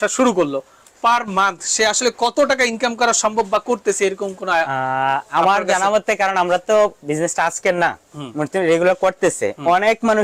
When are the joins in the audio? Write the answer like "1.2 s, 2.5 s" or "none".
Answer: none